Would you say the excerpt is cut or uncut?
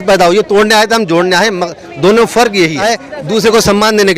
cut